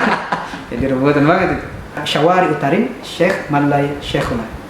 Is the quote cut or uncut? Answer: cut